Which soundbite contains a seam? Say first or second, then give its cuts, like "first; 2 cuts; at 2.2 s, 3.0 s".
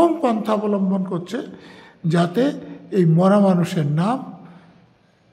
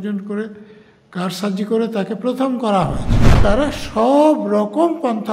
second; 1 cut; at 3.4 s